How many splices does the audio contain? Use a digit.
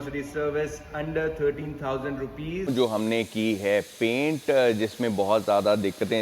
1